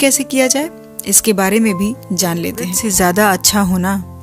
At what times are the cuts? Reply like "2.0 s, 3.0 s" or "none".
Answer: 2.8 s